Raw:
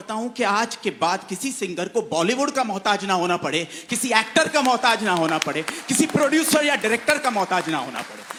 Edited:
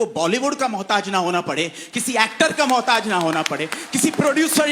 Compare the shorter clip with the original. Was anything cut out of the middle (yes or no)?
no